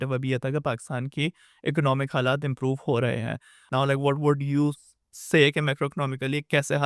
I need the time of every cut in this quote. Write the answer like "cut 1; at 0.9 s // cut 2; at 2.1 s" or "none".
cut 1; at 3.7 s